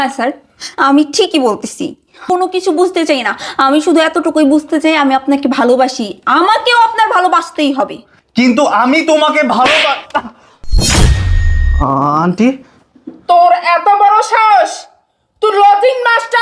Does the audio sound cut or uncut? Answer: cut